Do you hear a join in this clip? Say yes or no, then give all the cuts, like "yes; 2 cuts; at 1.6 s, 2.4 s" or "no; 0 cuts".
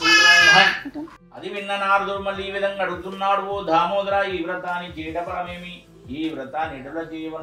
yes; 1 cut; at 1.2 s